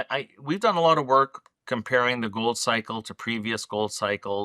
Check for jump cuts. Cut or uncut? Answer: uncut